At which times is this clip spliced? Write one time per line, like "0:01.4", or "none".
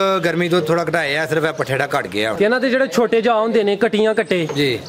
0:02.3